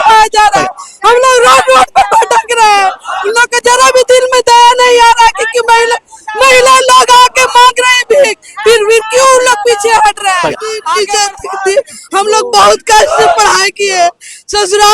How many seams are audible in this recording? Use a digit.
1